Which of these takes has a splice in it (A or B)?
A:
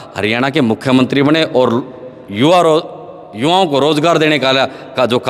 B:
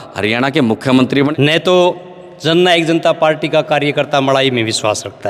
B